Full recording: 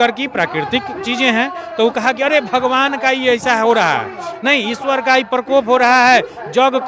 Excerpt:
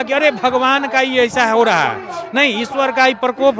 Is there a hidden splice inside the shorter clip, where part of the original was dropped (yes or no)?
no